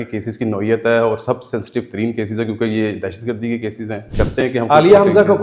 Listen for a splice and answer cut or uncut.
cut